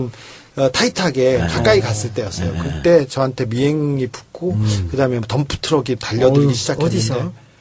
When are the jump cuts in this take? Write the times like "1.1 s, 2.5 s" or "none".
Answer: 5.0 s